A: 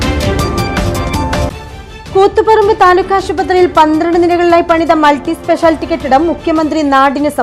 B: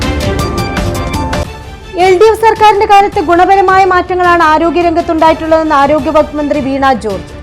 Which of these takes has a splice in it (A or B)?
A